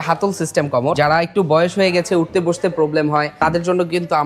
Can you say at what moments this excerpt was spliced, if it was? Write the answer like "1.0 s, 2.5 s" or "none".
1.0 s, 3.3 s